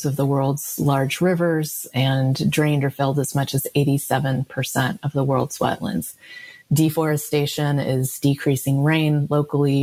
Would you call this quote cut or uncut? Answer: uncut